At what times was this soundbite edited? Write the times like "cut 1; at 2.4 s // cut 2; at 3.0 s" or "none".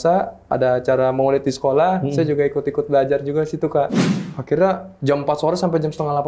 cut 1; at 4.0 s